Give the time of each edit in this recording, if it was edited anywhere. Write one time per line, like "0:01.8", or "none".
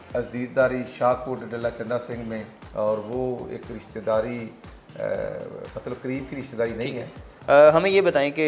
0:02.6
0:07.3

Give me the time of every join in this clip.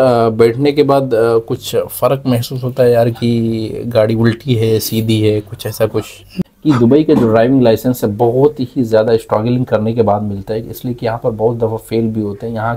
0:06.3

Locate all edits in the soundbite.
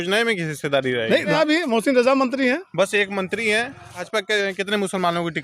0:01.3
0:04.0

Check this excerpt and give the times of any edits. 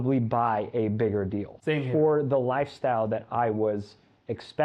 0:01.5

